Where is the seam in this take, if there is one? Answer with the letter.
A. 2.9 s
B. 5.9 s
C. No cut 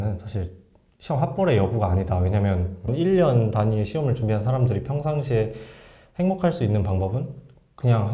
A